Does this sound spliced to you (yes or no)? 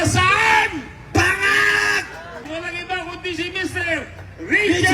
yes